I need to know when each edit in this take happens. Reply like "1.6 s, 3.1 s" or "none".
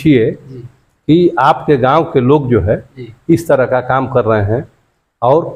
none